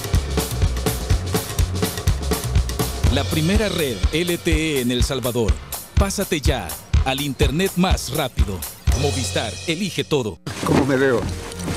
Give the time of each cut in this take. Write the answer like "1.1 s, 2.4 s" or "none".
10.5 s